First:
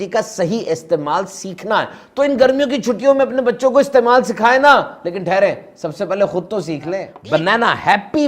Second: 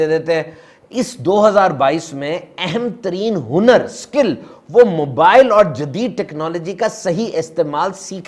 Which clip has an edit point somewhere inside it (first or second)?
first